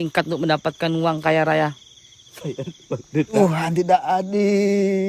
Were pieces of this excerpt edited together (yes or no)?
yes